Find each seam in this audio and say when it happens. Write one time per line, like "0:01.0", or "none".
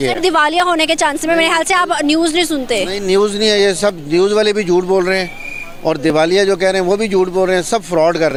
none